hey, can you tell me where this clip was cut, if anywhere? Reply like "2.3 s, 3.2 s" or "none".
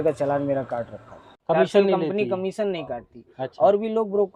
1.4 s